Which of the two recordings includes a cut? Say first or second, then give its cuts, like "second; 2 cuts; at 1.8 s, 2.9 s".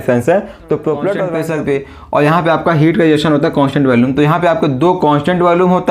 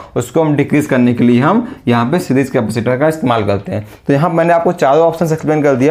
first; 1 cut; at 1.3 s